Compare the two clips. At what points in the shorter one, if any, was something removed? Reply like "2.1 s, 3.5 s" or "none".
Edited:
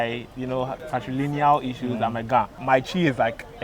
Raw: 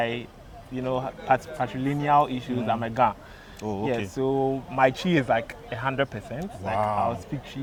0.8 s, 2.6 s